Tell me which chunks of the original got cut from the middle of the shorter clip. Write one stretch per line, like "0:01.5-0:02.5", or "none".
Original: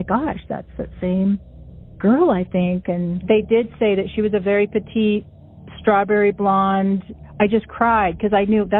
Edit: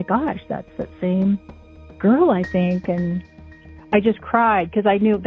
0:03.3-0:06.8